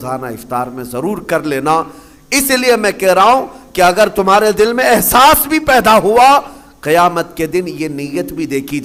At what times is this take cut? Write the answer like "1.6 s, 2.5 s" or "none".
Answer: none